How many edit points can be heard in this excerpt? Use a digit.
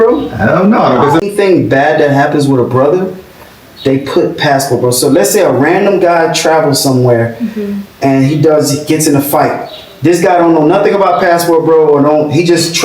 1